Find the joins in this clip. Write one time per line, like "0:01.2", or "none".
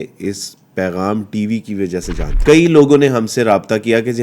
0:02.2